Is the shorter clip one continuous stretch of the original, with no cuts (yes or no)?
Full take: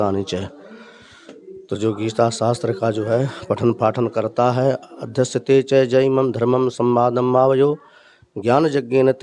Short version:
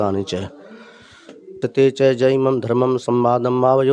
no